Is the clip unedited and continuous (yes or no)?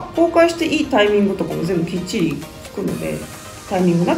yes